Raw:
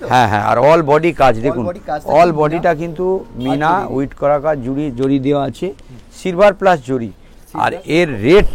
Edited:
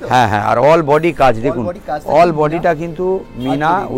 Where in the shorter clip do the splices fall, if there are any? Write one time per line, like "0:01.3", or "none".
none